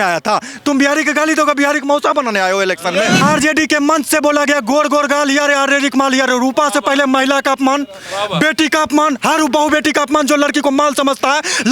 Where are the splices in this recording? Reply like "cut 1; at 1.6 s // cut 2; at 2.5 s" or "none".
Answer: cut 1; at 3.2 s

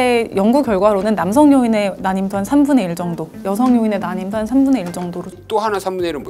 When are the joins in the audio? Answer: cut 1; at 5.4 s

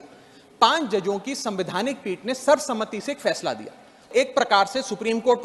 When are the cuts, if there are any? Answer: cut 1; at 4.1 s

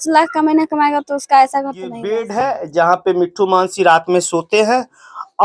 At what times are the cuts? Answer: cut 1; at 2.3 s

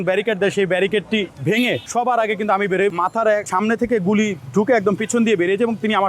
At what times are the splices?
cut 1; at 1.6 s // cut 2; at 3.3 s // cut 3; at 5.0 s

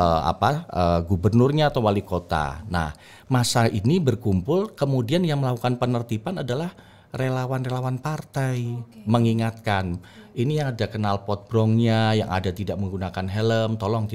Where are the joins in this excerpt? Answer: none

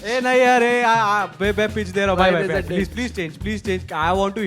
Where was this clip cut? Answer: none

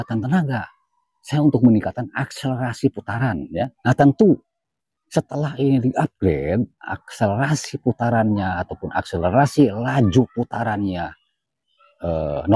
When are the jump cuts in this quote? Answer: cut 1; at 3.8 s

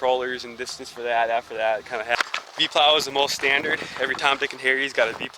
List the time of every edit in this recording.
cut 1; at 2.2 s

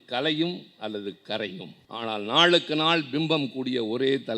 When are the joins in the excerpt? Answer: cut 1; at 1.8 s

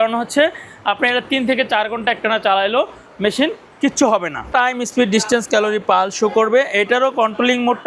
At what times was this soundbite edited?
cut 1; at 4.5 s

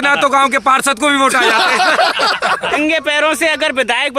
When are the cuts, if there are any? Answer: cut 1; at 2.8 s

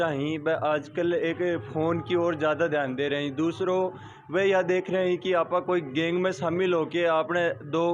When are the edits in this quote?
none

